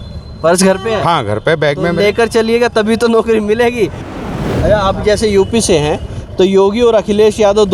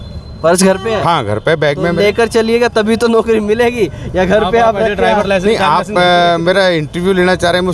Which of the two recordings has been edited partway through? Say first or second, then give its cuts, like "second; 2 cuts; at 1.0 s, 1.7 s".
first; 1 cut; at 4.2 s